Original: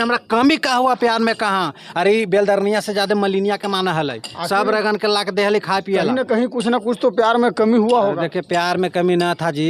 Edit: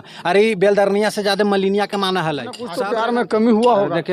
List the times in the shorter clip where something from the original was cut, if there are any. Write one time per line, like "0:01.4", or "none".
0:02.7